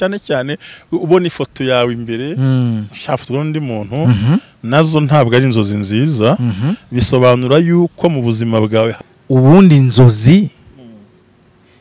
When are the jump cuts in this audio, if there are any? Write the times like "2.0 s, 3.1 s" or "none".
9.0 s